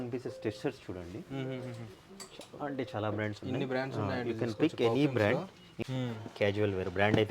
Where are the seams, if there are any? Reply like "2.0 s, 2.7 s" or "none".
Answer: 5.8 s